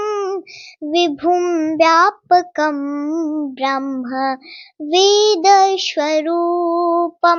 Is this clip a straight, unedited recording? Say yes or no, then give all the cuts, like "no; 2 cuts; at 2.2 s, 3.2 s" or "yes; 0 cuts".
yes; 0 cuts